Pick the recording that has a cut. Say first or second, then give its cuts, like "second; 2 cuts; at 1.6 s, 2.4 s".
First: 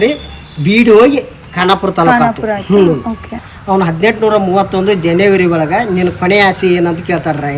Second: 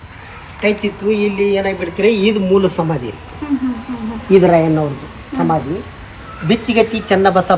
first; 1 cut; at 3.5 s